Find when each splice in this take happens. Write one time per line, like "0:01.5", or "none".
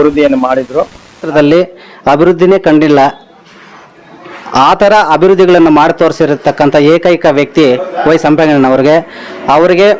0:01.3